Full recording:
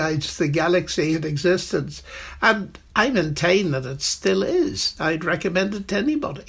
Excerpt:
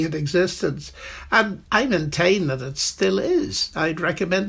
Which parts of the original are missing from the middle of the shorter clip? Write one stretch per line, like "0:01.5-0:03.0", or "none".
0:02.7-0:02.8

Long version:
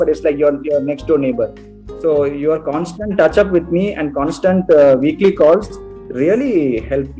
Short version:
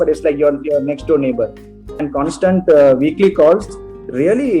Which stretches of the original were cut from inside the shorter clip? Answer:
0:01.9-0:04.0

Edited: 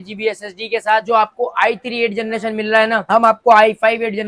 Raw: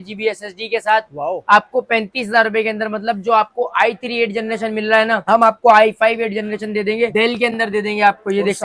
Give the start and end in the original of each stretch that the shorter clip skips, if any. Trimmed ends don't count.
0:01.0-0:03.2

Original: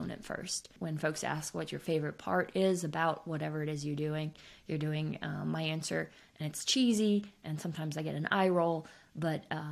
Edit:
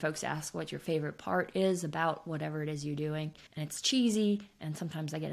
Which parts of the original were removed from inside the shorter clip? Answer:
0:04.5-0:06.3

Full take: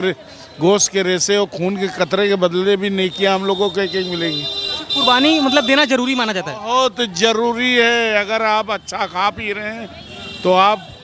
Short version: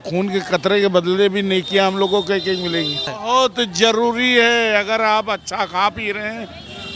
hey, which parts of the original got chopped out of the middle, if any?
0:04.6-0:06.5

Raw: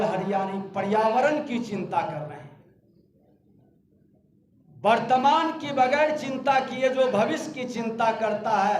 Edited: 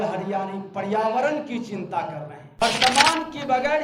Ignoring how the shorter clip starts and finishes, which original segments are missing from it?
0:02.6-0:04.9

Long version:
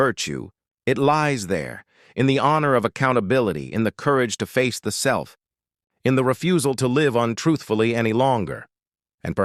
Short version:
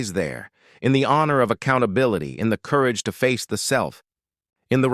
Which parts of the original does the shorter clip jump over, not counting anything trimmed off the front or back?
none

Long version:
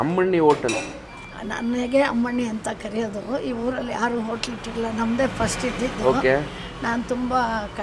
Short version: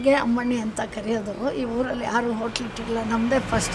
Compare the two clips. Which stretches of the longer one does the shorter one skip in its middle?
none

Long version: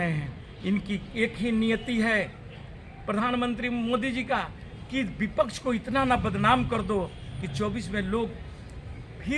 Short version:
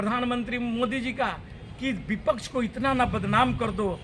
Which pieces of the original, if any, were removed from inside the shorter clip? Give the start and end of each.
none

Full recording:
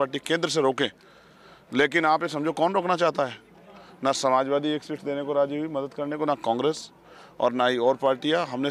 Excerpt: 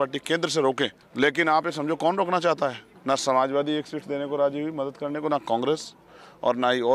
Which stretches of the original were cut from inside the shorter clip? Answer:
0:01.0-0:01.6
0:03.4-0:03.8

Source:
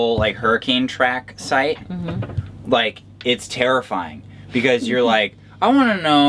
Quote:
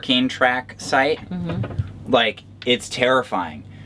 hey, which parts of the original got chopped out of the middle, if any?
none

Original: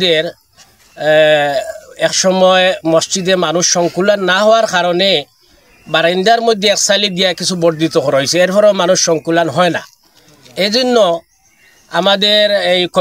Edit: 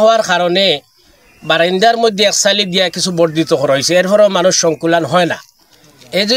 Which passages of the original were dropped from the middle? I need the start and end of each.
none

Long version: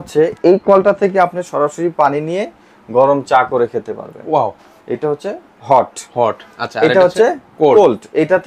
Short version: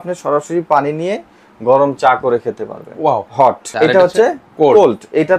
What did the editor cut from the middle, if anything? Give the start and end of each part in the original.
0:04.8-0:06.5

